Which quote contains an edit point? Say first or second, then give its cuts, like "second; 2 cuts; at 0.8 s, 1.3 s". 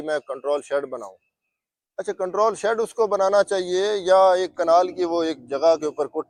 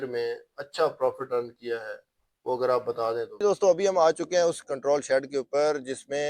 second; 1 cut; at 3.4 s